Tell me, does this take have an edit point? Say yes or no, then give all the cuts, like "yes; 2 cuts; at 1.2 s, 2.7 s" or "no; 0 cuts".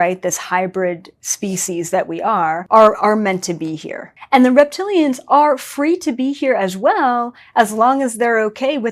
yes; 2 cuts; at 2.6 s, 4.1 s